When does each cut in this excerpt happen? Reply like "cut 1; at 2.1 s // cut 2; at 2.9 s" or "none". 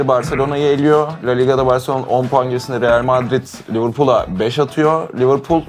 none